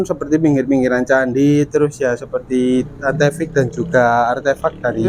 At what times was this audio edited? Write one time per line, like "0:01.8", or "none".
none

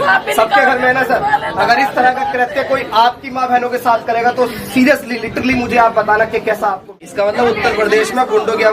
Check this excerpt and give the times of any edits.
0:07.0

